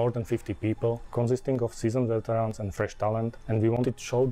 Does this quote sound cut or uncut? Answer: cut